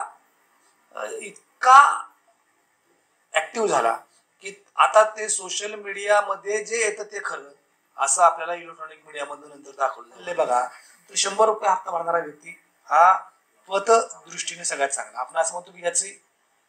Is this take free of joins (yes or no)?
no